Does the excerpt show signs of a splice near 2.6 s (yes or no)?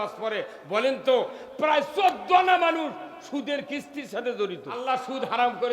no